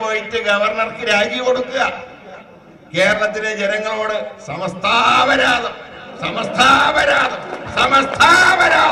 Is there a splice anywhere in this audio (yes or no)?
no